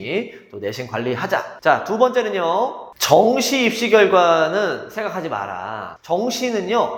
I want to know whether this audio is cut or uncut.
cut